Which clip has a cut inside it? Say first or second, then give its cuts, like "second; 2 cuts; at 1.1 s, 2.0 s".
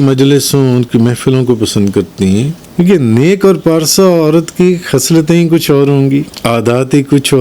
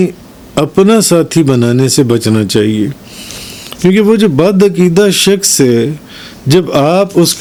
first; 2 cuts; at 2.6 s, 6.3 s